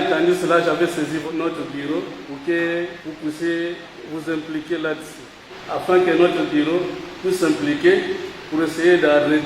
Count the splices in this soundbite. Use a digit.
6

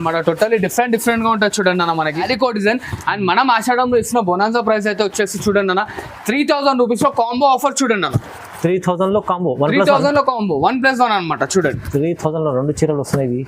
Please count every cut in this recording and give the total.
1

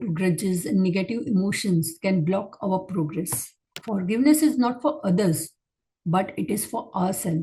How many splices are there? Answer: 1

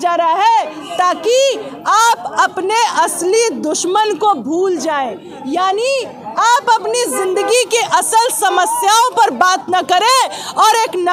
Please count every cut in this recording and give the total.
0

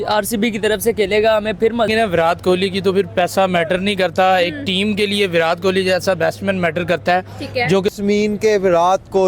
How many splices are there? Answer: 2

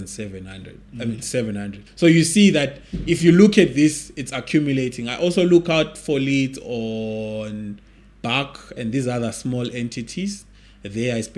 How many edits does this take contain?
1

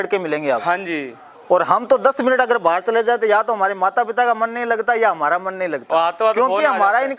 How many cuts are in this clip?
0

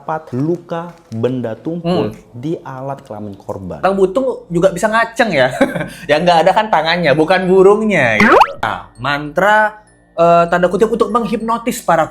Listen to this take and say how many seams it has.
2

